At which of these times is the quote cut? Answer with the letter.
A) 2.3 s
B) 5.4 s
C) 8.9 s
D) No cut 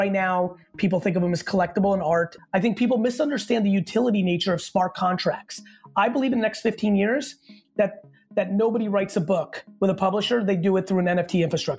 A